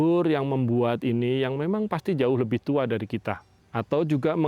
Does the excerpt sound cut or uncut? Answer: cut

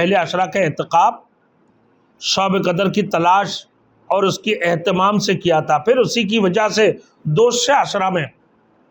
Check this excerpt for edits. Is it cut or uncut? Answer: uncut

